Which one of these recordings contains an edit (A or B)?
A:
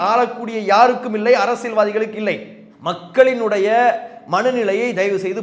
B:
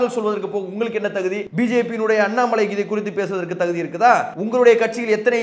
B